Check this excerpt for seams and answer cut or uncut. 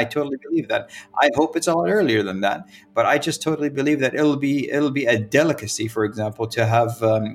uncut